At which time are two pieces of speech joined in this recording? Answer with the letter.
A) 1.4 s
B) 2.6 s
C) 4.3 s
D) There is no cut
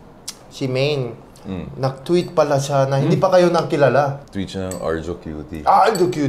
C